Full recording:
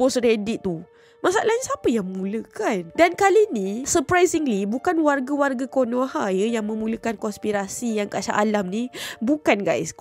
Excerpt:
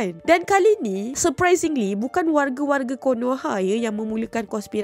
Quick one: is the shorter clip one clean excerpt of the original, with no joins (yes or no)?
yes